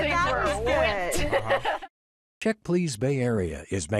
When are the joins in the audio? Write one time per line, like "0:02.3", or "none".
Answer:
0:01.8